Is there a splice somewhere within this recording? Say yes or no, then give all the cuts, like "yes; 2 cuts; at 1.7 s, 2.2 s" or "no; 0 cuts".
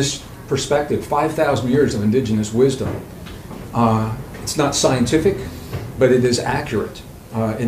no; 0 cuts